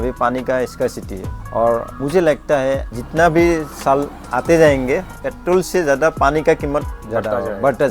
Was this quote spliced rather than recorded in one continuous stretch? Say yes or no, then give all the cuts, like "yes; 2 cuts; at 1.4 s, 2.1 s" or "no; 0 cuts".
no; 0 cuts